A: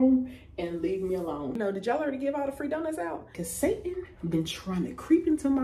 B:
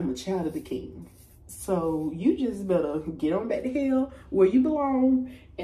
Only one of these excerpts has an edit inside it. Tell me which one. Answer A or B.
A